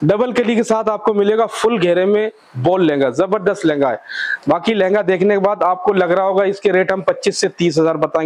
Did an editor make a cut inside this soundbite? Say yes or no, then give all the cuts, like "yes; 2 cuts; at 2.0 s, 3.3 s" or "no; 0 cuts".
no; 0 cuts